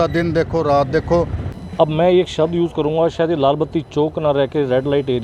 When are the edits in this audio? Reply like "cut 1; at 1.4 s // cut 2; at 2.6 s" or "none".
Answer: cut 1; at 1.5 s